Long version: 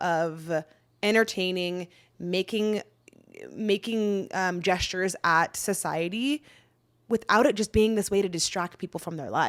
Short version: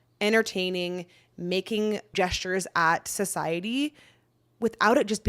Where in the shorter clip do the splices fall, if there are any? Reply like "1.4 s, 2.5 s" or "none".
2.1 s